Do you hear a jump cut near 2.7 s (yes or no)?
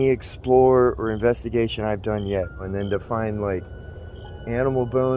yes